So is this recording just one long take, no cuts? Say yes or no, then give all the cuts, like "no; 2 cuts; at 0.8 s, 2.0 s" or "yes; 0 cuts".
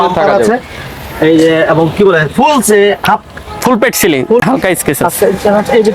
no; 1 cut; at 4.4 s